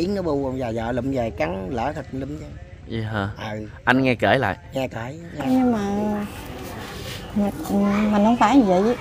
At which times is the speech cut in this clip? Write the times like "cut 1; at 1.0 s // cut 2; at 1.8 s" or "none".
cut 1; at 5.5 s